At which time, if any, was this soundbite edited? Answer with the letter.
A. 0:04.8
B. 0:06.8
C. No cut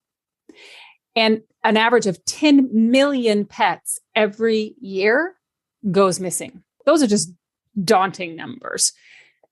B